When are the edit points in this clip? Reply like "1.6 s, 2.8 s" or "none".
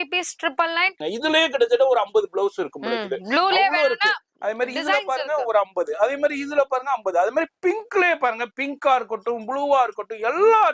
1.0 s

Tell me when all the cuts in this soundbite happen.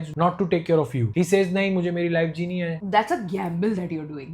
2.8 s

